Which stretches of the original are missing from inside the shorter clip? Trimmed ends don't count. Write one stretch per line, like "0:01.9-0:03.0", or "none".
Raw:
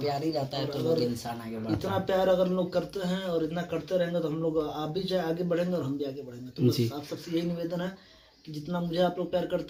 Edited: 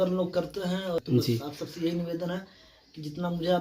0:03.4-0:06.5

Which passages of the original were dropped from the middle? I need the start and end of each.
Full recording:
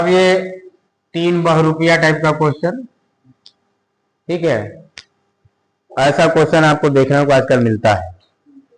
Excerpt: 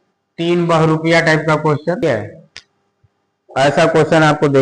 0:02.8-0:04.4

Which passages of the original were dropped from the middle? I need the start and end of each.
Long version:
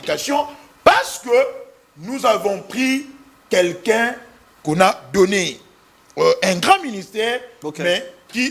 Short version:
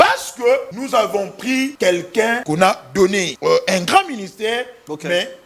0:02.2-0:03.0
0:04.1-0:04.6
0:05.5-0:06.1

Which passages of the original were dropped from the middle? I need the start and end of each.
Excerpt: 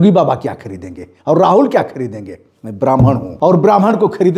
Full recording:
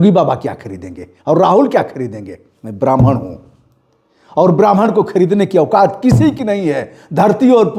0:03.3-0:04.2

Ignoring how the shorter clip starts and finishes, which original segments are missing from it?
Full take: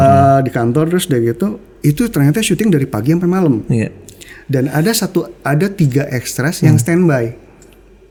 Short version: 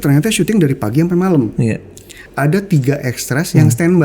0:04.4-0:05.3

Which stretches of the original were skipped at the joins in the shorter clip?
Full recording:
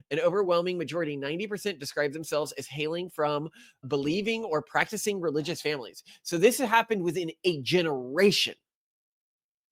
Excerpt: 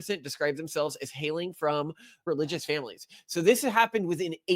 0:03.8-0:05.2

